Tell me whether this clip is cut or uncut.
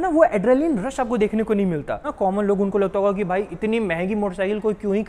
cut